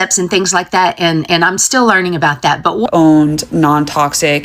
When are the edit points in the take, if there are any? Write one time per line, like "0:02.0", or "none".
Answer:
0:02.8